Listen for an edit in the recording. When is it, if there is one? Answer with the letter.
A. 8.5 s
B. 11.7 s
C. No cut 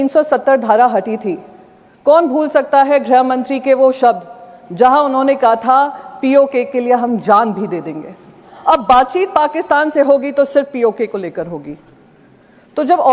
A